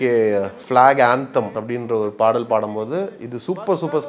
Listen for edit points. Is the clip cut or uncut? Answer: cut